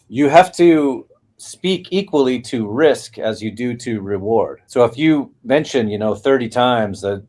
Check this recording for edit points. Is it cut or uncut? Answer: cut